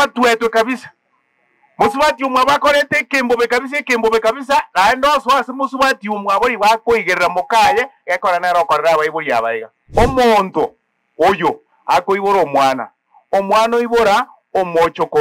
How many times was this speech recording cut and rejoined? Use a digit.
1